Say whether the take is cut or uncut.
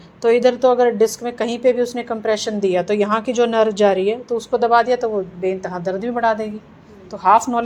uncut